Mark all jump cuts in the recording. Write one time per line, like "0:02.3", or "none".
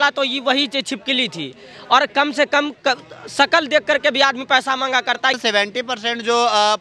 0:05.4